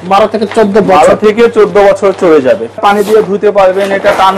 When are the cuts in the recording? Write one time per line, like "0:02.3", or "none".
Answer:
0:02.8